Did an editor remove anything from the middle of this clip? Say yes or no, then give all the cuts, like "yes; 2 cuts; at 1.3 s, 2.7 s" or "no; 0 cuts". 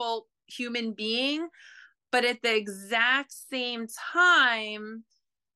no; 0 cuts